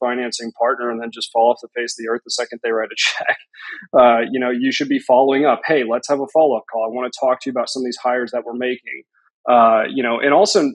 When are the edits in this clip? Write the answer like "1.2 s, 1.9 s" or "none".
none